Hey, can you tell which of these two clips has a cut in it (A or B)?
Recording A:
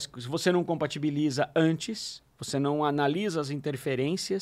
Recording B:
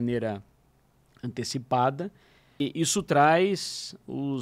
B